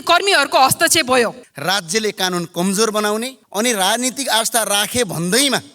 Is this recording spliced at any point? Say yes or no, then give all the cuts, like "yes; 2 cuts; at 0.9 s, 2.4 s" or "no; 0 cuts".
yes; 2 cuts; at 1.5 s, 3.4 s